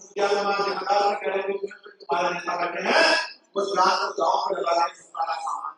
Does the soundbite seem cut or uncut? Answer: uncut